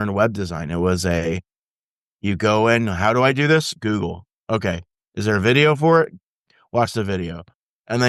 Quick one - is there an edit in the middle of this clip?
no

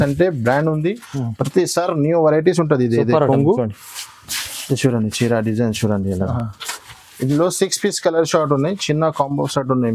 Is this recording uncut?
yes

